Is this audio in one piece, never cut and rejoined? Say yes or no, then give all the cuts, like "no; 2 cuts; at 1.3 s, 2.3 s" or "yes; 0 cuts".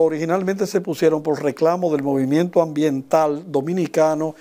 yes; 0 cuts